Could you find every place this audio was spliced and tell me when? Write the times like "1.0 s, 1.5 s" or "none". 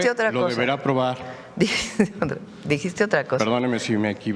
none

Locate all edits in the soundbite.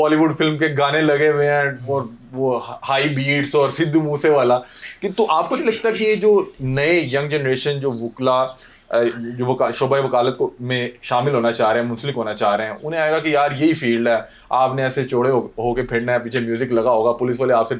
none

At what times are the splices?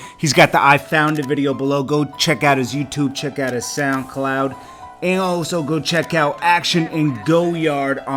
none

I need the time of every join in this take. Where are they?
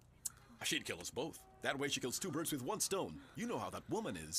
2.8 s

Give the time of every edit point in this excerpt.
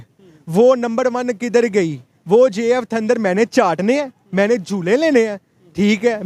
none

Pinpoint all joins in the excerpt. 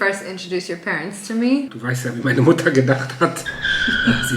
1.8 s

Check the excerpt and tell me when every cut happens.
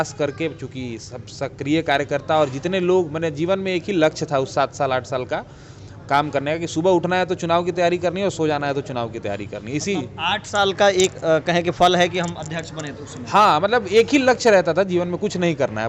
none

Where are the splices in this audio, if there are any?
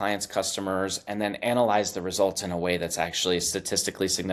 none

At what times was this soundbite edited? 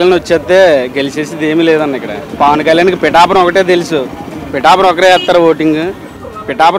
2.2 s

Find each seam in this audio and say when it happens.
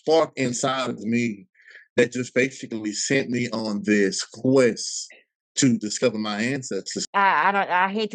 7.0 s

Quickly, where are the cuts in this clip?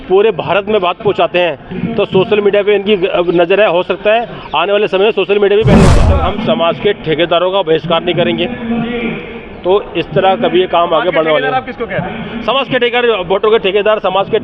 6.0 s

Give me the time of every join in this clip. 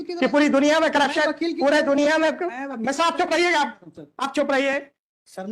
none

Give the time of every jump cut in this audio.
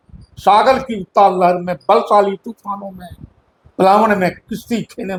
none

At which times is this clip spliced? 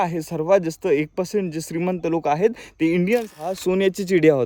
3.3 s

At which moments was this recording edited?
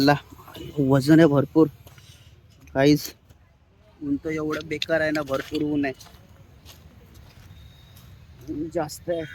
none

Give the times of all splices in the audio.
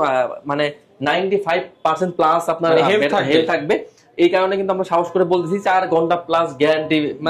none

